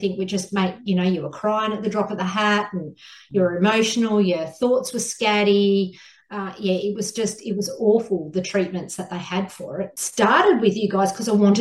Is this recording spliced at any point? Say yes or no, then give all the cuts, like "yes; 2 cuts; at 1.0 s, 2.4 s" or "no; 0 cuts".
yes; 1 cut; at 10.0 s